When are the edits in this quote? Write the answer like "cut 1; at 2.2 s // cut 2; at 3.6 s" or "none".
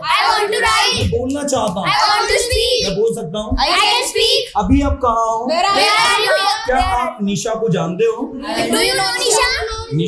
none